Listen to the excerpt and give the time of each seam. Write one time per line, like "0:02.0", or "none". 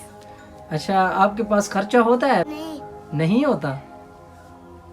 0:02.6